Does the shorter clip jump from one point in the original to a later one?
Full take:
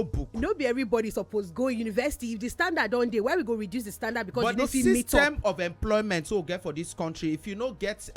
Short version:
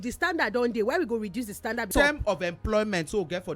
yes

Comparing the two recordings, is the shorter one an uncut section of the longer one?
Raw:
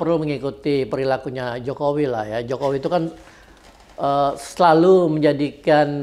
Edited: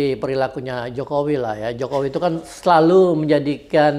no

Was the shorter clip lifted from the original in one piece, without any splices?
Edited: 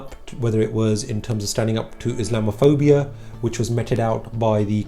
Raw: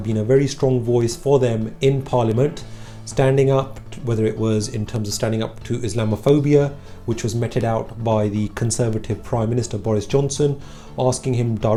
yes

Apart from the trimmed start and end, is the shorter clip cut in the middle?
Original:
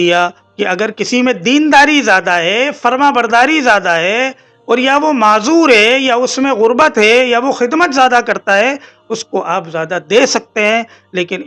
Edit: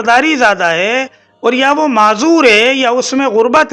no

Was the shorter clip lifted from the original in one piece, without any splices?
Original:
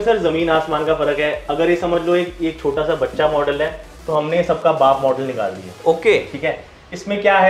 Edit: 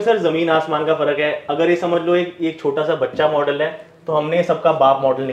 yes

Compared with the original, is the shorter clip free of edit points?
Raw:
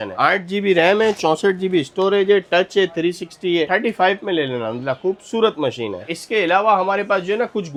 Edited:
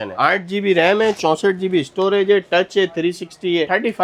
yes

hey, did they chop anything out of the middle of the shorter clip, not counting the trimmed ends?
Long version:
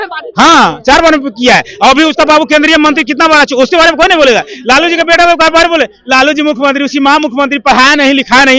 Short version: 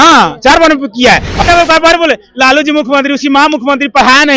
yes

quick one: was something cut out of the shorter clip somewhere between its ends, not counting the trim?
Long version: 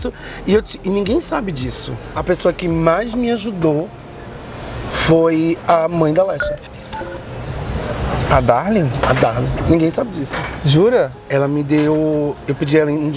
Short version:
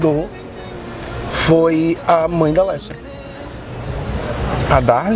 no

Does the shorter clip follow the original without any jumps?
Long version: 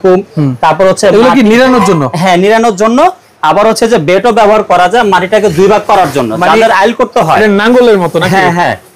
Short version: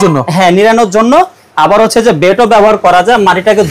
yes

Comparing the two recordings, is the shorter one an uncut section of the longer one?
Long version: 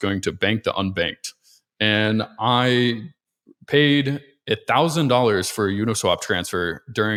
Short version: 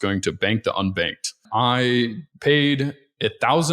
no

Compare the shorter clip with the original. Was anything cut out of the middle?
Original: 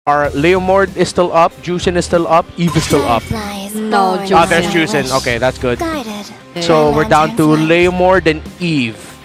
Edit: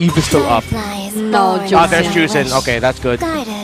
no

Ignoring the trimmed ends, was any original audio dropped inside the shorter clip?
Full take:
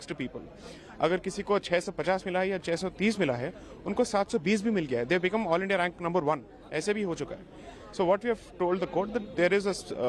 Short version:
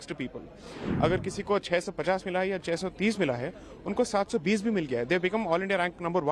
no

